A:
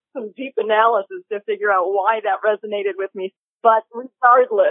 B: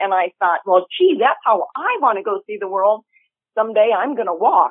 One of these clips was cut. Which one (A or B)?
A